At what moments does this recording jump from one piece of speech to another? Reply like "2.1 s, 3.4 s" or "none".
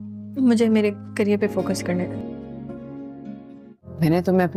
none